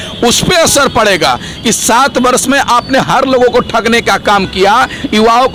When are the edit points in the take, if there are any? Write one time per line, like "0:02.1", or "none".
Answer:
none